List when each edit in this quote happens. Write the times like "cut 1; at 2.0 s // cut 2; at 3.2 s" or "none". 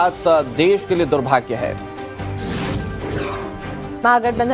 cut 1; at 2.9 s